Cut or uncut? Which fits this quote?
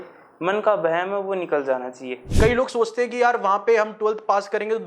cut